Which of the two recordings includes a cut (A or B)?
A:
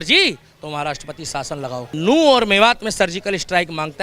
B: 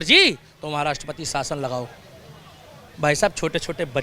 A